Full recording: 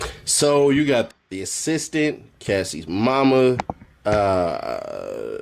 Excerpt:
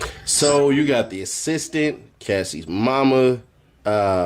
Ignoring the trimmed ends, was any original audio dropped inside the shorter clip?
yes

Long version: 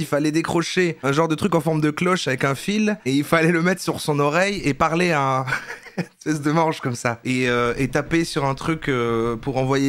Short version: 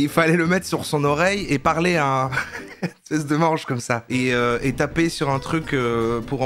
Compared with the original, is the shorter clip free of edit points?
yes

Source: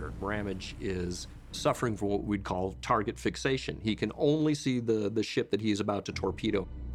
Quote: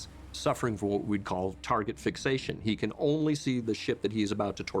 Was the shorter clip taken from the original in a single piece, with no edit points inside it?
no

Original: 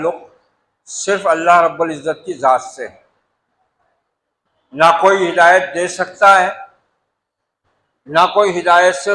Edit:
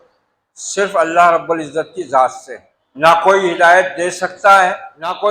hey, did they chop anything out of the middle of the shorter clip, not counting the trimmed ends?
yes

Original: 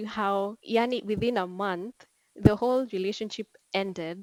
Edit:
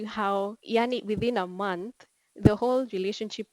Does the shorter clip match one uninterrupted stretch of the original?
yes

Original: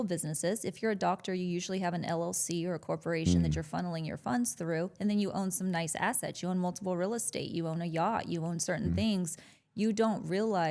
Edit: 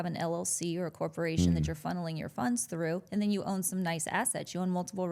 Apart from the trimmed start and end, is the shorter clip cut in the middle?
no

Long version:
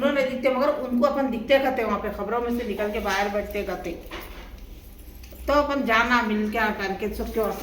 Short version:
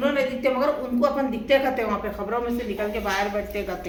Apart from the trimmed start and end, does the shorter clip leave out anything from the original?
no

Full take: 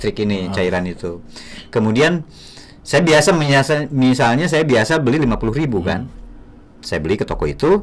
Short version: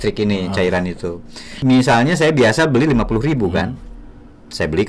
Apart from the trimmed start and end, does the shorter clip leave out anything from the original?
yes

